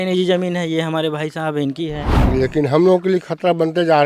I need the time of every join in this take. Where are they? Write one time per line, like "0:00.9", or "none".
0:02.2